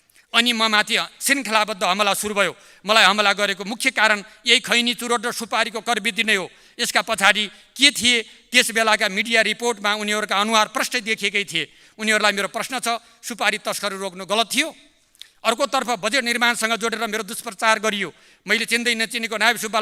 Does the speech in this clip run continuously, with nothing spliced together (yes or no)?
yes